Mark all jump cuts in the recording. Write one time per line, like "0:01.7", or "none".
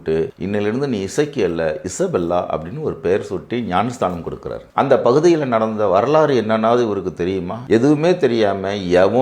0:04.6